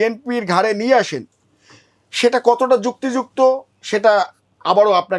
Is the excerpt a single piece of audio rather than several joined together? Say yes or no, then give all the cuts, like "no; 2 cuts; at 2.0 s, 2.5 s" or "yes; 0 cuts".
yes; 0 cuts